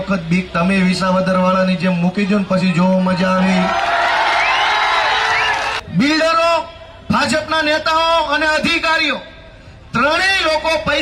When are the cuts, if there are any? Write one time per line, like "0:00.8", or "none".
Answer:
0:05.8